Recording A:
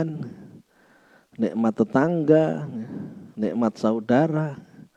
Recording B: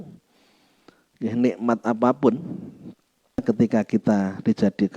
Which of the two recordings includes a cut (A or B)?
B